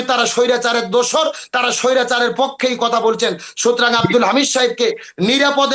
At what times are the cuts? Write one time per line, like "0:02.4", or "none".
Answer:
none